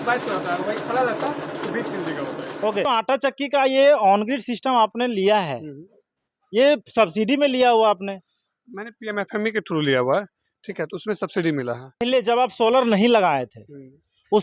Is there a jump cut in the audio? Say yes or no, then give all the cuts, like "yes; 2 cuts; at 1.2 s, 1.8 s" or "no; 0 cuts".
yes; 2 cuts; at 2.9 s, 12.0 s